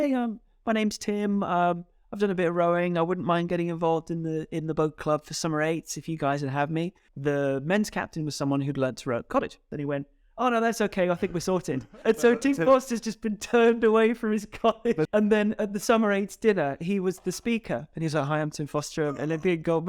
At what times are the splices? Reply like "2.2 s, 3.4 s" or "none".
7.0 s, 9.6 s, 12.0 s, 15.1 s